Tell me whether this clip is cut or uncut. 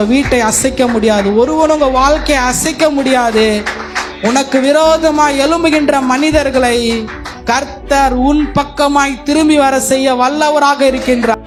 uncut